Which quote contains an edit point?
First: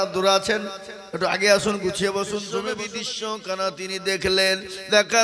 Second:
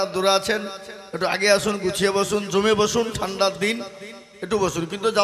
first; 1 cut; at 2.6 s

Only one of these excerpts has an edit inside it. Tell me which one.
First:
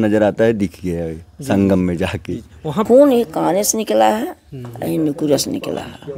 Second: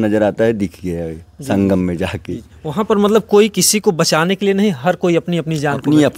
first; 1 cut; at 2.9 s

